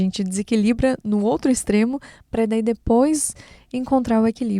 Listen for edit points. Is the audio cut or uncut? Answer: uncut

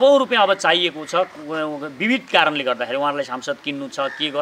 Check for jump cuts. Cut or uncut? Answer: uncut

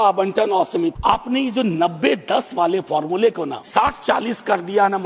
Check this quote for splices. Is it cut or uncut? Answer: cut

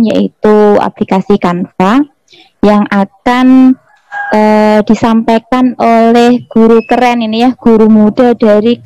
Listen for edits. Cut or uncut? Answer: uncut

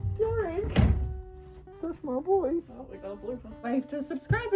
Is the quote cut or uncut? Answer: cut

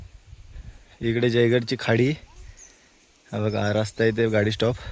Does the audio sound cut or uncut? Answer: uncut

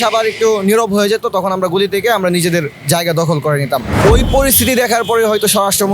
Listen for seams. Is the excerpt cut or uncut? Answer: cut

